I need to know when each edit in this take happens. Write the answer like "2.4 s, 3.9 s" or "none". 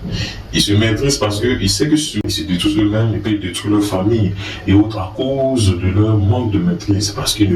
2.2 s